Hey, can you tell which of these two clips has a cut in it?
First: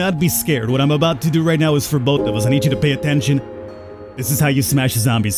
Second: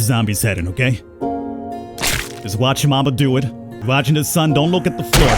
second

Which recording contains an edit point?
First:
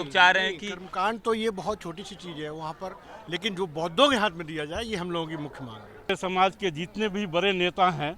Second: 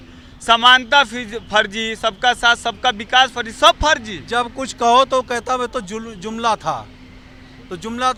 first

